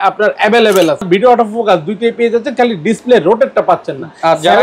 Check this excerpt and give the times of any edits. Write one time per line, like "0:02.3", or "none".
0:01.1